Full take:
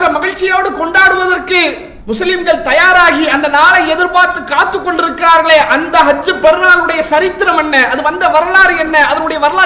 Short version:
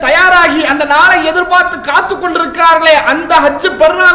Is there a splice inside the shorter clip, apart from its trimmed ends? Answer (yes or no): no